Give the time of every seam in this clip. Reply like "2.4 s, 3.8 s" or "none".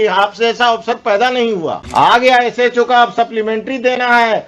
1.8 s